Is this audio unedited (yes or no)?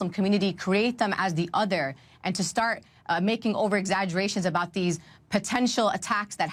yes